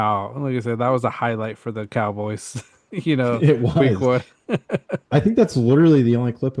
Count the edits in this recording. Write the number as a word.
zero